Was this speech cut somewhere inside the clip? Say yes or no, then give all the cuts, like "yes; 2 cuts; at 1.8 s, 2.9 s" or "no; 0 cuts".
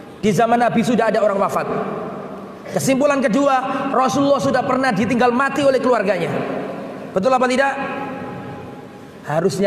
no; 0 cuts